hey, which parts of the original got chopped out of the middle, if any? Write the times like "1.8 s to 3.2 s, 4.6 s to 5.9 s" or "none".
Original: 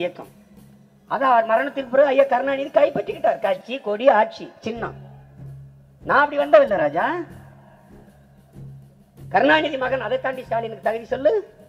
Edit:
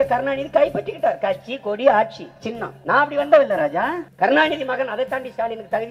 4.9 s to 5.9 s, 7.3 s to 9.2 s